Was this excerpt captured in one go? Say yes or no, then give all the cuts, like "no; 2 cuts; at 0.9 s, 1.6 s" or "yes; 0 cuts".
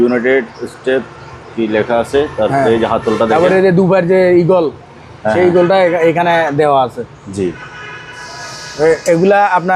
yes; 0 cuts